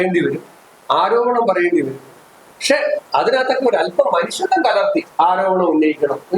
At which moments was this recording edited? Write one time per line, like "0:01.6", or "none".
0:05.1